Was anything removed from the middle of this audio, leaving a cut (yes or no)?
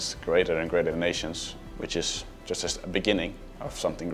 yes